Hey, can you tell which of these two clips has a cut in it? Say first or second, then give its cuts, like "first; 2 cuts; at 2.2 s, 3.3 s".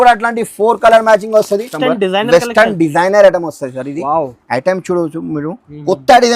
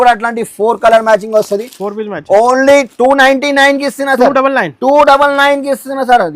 first; 1 cut; at 1.7 s